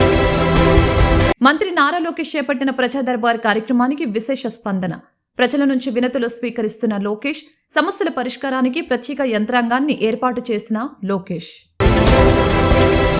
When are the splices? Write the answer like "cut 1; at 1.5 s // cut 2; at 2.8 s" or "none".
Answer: none